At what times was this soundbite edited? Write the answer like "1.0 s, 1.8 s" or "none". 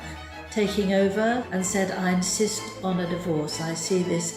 1.5 s